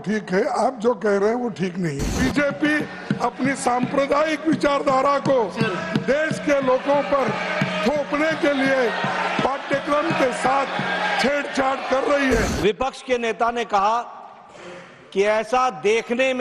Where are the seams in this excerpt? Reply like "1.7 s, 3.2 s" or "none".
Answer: 2.1 s, 12.5 s